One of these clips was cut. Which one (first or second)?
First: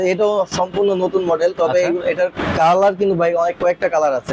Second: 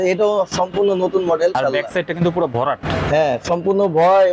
second